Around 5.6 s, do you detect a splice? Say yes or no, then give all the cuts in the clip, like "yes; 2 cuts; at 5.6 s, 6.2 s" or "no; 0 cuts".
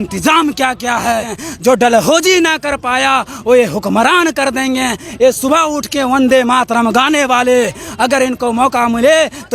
no; 1 cut; at 1.4 s